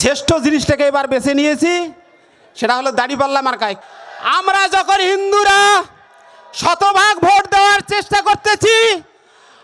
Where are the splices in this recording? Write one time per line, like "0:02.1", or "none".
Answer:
0:03.8